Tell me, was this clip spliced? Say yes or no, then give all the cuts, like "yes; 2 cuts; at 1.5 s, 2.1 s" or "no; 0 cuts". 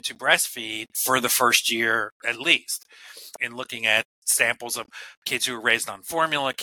yes; 3 cuts; at 1.0 s, 3.4 s, 4.2 s